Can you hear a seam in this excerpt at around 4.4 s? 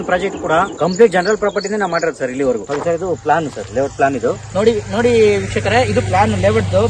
no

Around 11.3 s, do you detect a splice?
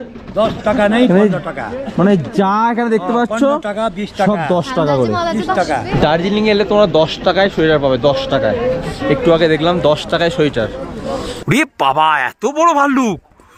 yes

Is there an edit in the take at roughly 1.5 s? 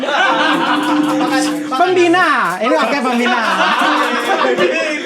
no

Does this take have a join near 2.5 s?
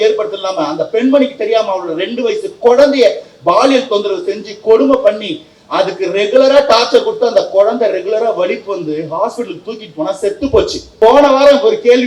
no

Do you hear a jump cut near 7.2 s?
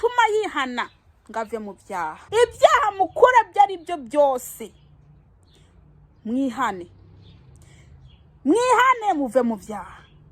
no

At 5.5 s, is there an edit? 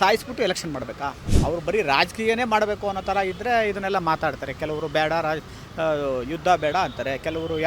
no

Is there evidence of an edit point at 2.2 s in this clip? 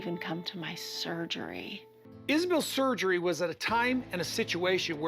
yes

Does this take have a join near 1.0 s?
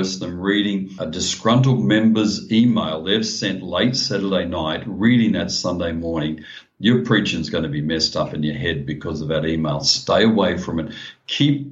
yes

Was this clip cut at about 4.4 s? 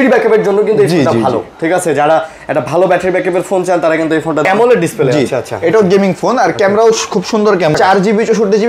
yes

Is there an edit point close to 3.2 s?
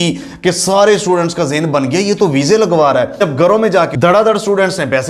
yes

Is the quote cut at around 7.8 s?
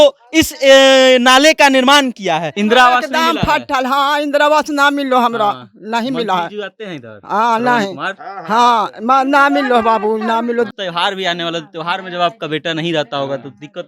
no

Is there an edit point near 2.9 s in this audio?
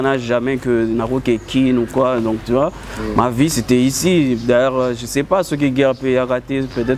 no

